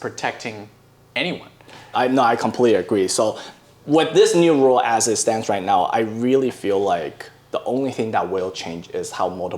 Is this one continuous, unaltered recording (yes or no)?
no